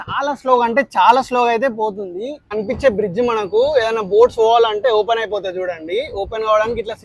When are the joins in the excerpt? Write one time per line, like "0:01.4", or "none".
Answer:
0:02.4

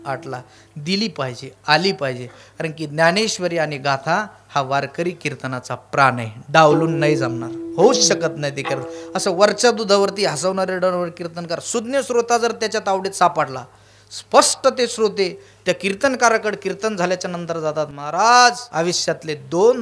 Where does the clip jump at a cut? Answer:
0:18.6

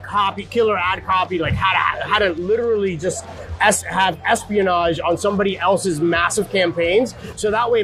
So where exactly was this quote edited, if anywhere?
none

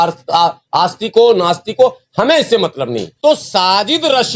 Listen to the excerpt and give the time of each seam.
0:03.1

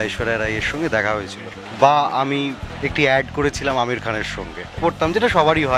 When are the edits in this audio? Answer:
0:01.6
0:02.6
0:04.8

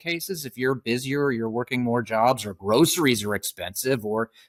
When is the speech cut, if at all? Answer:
none

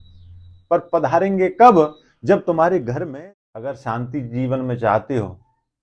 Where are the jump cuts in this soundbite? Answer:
0:03.0

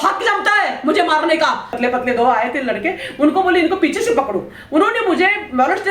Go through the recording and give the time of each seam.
0:01.7

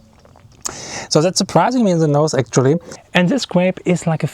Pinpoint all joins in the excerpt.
0:02.9

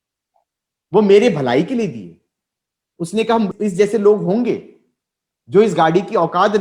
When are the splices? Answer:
0:03.5

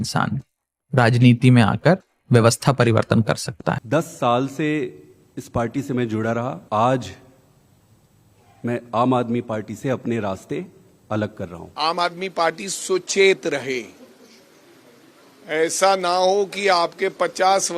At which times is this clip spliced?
0:03.8
0:06.6
0:11.6

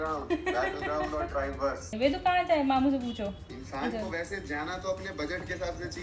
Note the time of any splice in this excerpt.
0:01.9

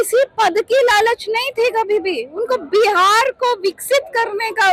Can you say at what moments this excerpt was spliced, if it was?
none

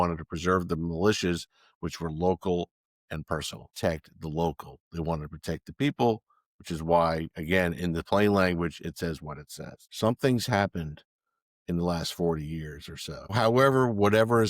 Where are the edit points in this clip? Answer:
0:03.6
0:09.8
0:13.3

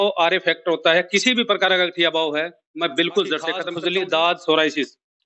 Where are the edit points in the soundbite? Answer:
0:03.7

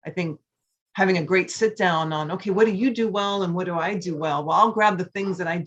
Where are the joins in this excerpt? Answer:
none

